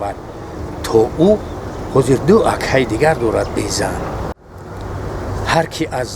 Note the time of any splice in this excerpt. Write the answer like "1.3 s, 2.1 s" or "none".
4.4 s